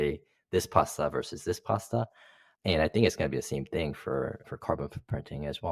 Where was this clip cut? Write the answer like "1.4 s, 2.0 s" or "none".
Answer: none

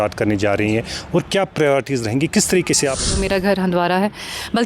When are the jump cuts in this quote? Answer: 3.2 s

